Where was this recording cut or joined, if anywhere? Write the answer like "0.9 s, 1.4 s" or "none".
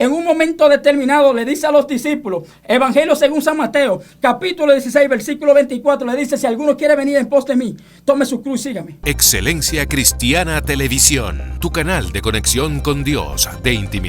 8.9 s

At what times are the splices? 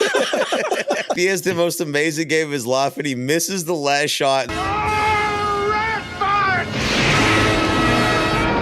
1.2 s, 4.5 s

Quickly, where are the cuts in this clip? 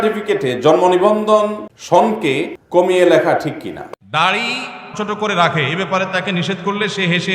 1.7 s, 2.6 s, 3.9 s

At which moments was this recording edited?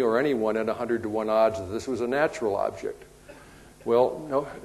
3.7 s

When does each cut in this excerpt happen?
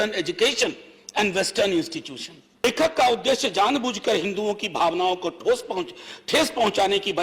2.6 s

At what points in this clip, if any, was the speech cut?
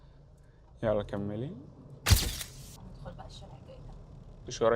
2.3 s

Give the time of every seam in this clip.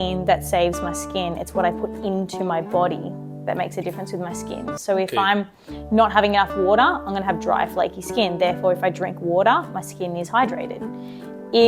none

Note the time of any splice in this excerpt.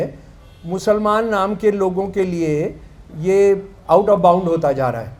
none

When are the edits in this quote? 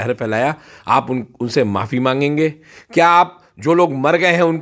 none

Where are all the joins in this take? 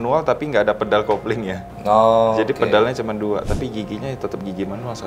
none

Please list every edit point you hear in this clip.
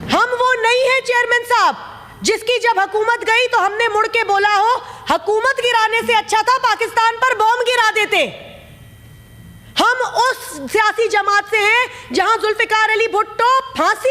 none

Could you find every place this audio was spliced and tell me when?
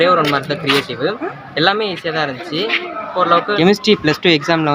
1.3 s, 3.6 s

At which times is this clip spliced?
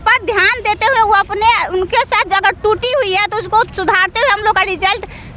none

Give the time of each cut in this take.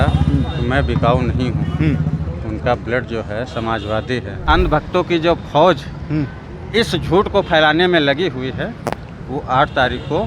4.4 s

